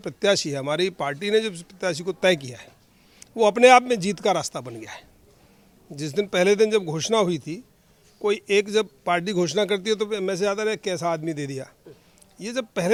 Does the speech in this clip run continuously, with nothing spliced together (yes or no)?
yes